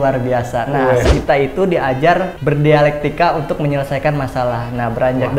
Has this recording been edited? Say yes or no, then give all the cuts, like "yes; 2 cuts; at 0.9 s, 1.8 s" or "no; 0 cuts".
yes; 2 cuts; at 1.1 s, 2.3 s